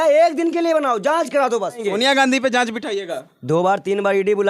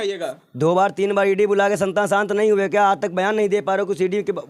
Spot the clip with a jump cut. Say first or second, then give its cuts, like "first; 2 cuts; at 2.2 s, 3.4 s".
first; 1 cut; at 1.8 s